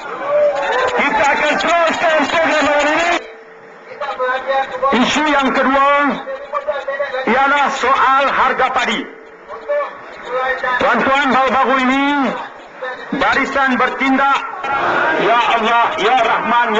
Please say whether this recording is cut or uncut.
cut